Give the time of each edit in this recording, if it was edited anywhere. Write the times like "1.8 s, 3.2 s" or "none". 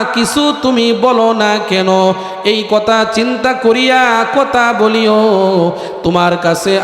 none